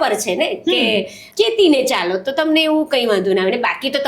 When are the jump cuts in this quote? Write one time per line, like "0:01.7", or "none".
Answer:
0:01.2